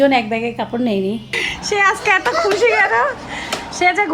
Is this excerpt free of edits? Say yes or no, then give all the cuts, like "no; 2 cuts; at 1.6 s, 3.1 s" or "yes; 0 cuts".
no; 1 cut; at 1.4 s